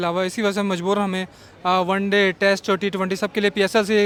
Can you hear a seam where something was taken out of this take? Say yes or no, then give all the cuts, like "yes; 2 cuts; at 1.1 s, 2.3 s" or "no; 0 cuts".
no; 0 cuts